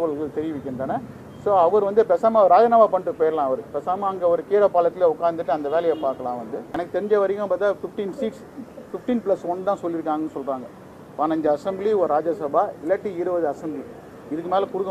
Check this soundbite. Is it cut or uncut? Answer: cut